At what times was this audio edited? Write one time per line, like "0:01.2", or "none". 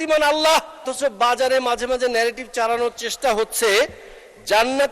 0:00.9